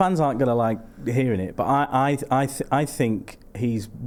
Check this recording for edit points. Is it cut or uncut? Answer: uncut